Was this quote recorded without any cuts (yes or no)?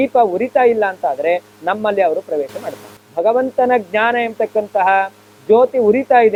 yes